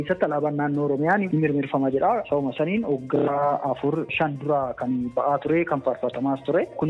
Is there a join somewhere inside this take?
yes; 2 cuts; at 1.3 s, 4.1 s

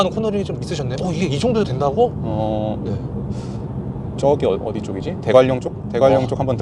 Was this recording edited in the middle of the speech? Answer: no; 0 cuts

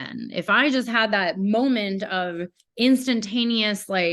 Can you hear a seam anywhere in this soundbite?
no; 0 cuts

